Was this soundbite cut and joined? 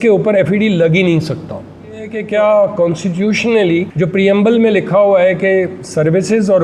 yes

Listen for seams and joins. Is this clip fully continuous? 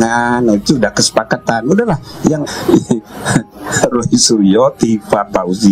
no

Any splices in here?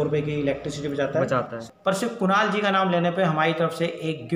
yes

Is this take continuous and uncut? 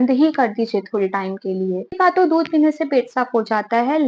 no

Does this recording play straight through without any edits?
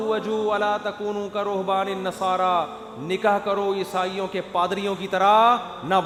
yes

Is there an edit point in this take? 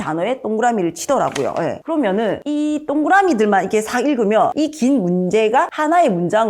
no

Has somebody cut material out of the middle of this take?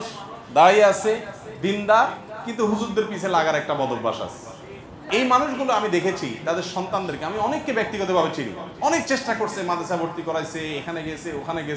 yes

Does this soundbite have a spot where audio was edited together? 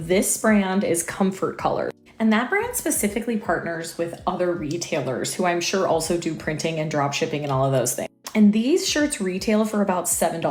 no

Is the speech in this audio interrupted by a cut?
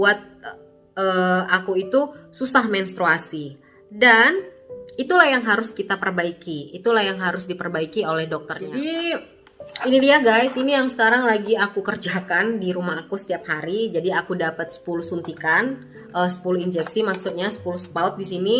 yes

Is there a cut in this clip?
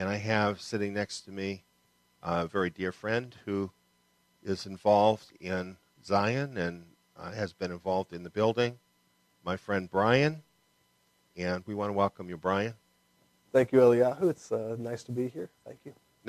yes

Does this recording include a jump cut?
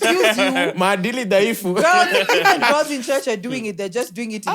no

